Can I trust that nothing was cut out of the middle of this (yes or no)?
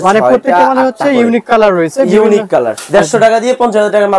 no